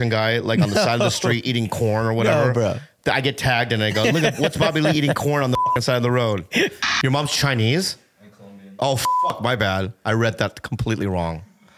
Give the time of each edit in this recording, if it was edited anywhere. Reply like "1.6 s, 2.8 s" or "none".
6.9 s